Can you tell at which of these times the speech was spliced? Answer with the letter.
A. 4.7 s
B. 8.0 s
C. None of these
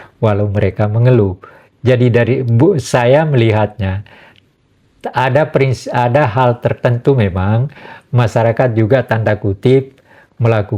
C